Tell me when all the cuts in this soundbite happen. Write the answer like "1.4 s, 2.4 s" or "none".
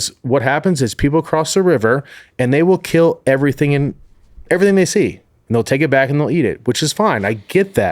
5.3 s